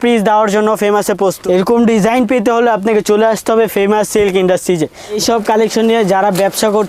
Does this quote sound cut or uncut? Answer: cut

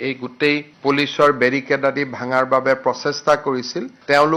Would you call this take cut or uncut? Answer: uncut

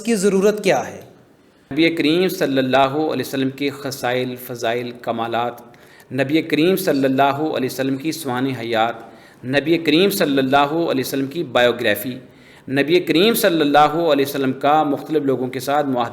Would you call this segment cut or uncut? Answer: cut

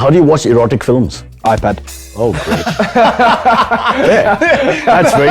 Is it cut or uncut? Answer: cut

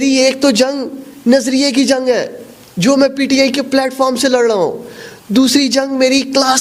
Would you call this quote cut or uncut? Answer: uncut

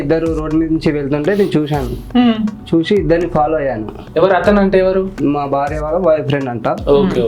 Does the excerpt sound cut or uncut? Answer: cut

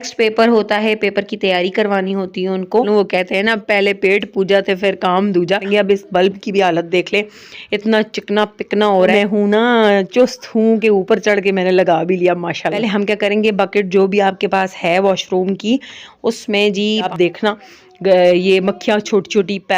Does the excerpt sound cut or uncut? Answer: cut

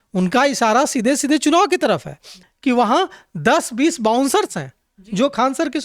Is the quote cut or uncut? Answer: cut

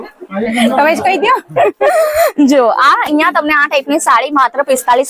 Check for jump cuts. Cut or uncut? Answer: uncut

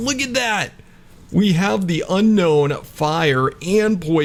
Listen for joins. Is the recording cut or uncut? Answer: uncut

